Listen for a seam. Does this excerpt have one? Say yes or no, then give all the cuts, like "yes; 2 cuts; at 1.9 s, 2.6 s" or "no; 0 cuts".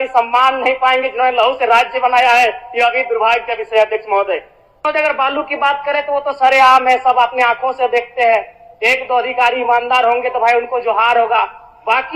yes; 1 cut; at 4.9 s